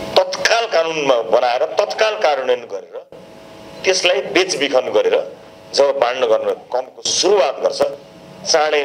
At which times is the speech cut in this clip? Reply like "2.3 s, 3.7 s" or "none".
none

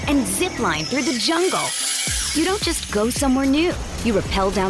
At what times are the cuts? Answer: none

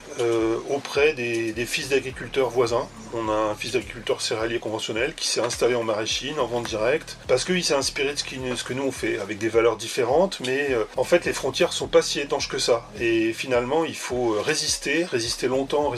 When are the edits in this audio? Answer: 7.1 s, 10.9 s

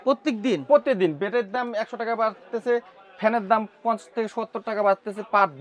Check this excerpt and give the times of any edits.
none

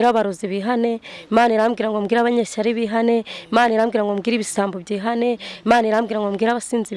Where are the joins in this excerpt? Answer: none

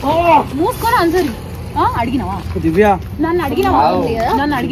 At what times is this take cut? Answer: none

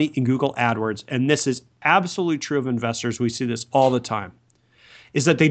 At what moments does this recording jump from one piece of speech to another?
none

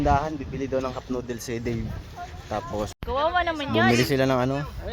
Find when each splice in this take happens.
2.9 s

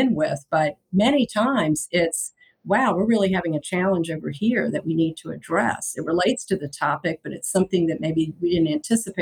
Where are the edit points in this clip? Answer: none

